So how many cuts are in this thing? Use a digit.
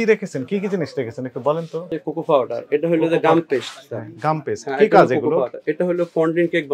1